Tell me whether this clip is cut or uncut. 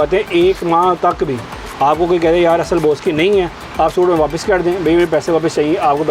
uncut